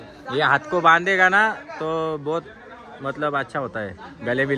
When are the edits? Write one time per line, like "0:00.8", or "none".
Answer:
none